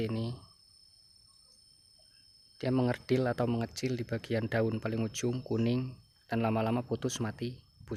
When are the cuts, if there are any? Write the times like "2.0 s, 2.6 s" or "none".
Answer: none

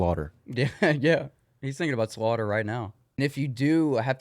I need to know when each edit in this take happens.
3.2 s

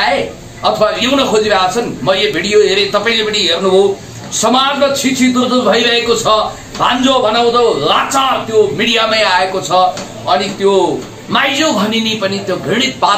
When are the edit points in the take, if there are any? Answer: none

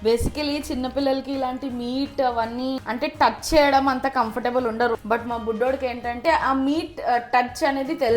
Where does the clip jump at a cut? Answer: 2.8 s, 5.0 s, 6.2 s

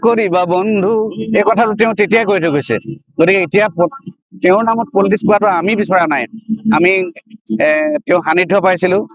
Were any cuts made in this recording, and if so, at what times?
none

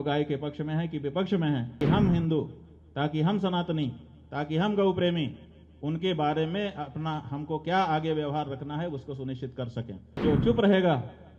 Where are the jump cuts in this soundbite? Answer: 1.8 s, 10.2 s

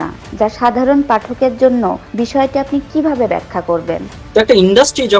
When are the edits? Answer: 2.0 s, 4.1 s

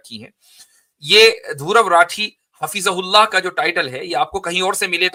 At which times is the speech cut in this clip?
none

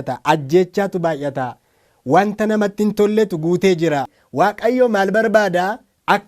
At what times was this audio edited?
4.2 s

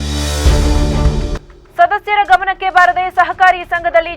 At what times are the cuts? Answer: 1.4 s

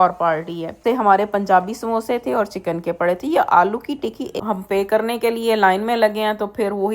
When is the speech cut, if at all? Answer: 0.8 s, 4.3 s

